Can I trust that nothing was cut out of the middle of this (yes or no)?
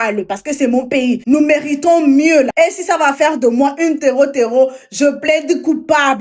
no